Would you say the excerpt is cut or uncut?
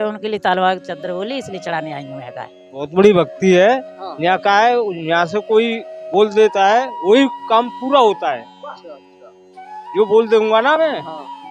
cut